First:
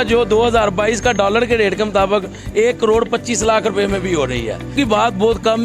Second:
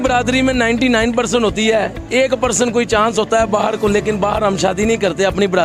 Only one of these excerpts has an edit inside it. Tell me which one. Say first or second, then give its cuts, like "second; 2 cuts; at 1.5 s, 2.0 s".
first; 1 cut; at 4.8 s